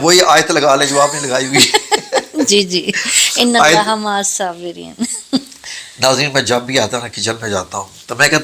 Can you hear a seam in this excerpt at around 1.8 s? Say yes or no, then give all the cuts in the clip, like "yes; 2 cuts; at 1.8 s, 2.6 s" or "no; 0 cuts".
no; 0 cuts